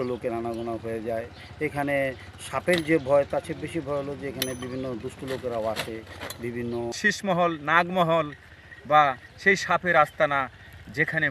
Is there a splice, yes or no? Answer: yes